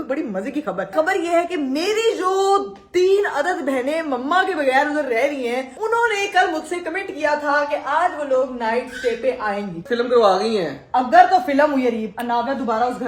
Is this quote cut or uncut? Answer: cut